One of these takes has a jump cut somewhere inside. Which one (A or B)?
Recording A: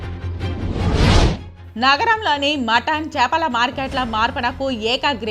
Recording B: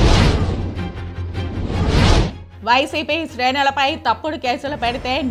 A